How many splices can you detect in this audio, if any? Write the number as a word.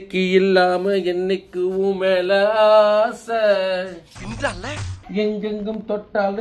zero